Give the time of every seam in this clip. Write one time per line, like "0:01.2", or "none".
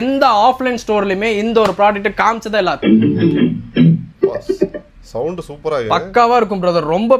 0:02.8
0:04.1